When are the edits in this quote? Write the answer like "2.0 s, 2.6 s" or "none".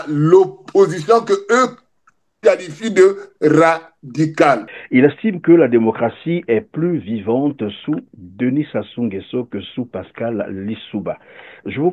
4.7 s